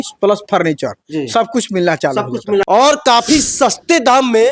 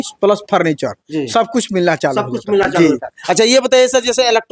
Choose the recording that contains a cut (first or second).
first